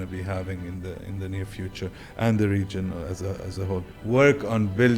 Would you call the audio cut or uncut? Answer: cut